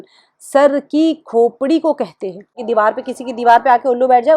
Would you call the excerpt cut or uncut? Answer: cut